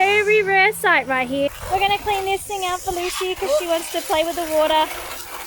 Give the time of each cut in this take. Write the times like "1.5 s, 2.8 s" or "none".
1.6 s